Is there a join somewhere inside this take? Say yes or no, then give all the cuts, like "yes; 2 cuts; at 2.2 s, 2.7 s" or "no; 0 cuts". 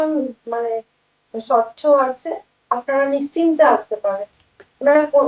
no; 0 cuts